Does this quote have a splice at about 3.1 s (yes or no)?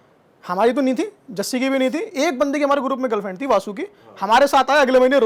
no